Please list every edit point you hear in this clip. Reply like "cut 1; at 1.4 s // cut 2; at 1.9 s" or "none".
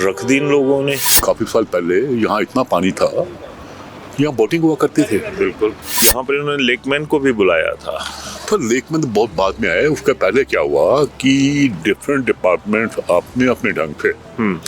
cut 1; at 1.1 s // cut 2; at 5.9 s